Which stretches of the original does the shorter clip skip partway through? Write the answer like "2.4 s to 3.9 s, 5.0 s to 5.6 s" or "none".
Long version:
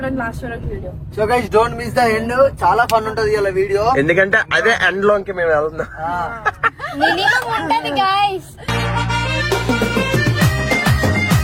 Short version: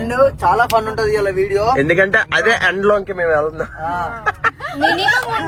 none